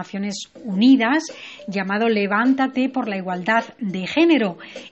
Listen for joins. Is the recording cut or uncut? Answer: cut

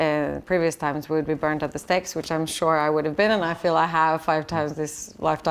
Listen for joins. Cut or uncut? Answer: uncut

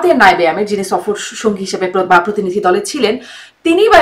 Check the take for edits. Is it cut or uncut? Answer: uncut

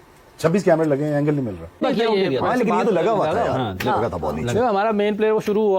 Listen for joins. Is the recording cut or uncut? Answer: cut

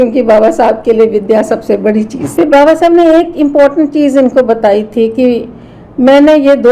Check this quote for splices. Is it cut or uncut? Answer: cut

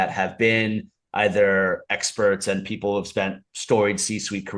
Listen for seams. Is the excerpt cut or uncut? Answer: uncut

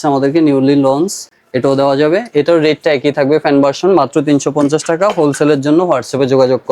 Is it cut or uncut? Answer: uncut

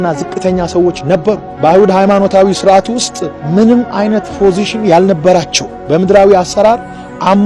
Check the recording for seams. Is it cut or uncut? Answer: uncut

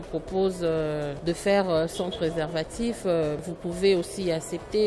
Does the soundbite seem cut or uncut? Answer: cut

